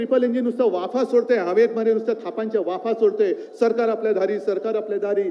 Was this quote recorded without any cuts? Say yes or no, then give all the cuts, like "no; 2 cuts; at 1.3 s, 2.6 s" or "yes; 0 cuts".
yes; 0 cuts